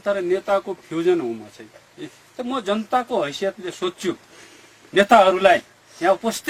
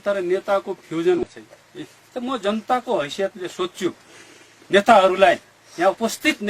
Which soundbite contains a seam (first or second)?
second